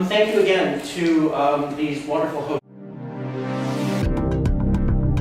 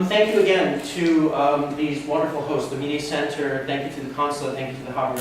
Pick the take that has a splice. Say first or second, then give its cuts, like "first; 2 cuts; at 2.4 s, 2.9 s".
second; 1 cut; at 2.6 s